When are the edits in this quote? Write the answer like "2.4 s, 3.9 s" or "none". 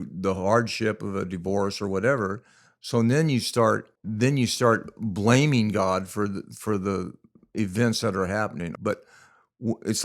4.0 s, 8.7 s